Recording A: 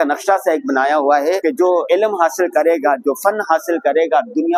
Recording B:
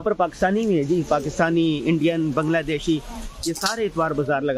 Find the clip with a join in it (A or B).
A